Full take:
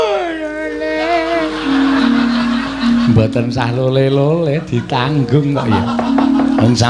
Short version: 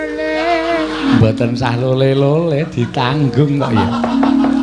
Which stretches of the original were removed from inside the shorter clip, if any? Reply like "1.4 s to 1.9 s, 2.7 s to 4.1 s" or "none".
1.8 s to 3.1 s